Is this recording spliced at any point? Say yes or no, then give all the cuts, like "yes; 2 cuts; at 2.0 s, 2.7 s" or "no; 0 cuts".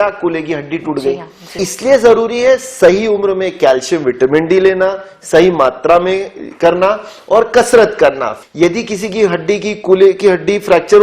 yes; 2 cuts; at 1.7 s, 8.3 s